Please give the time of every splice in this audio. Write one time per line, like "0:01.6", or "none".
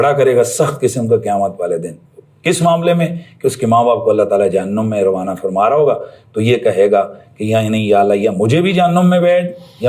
none